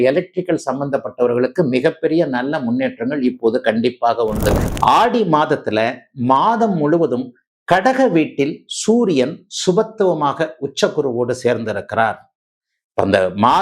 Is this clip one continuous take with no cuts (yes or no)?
no